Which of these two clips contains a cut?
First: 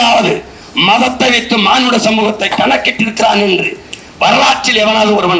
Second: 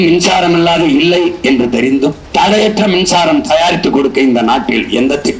second; 1 cut; at 2.2 s

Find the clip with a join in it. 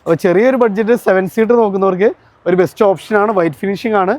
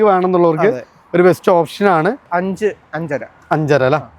second; 1 cut; at 2.3 s

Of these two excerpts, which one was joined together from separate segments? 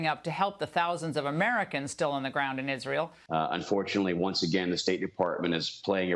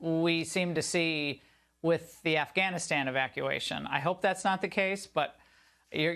first; 1 cut; at 3.2 s

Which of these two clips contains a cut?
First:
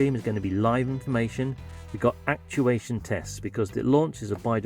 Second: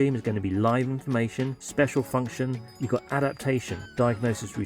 second; 3 cuts; at 1.6 s, 2.7 s, 3.8 s

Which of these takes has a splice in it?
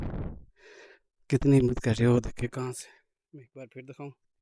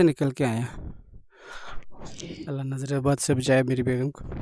second; 1 cut; at 2.4 s

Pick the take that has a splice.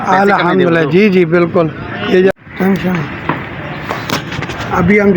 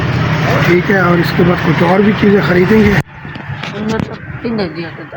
first; 1 cut; at 2.3 s

